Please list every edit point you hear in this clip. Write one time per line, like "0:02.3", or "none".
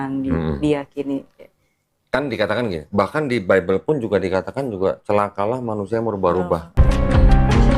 0:06.8